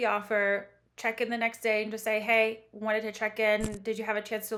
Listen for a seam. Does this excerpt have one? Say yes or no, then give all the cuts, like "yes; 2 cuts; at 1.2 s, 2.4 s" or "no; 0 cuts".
no; 0 cuts